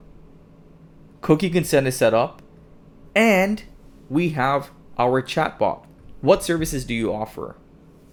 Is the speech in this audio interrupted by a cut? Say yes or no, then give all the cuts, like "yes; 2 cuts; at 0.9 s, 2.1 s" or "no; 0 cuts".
no; 0 cuts